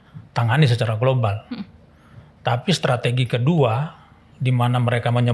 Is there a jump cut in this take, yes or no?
no